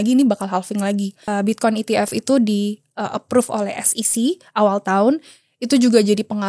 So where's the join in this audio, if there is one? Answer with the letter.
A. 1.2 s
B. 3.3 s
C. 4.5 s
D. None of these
A